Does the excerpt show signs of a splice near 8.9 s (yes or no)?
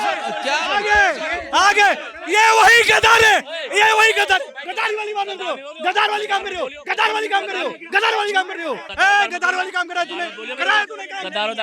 yes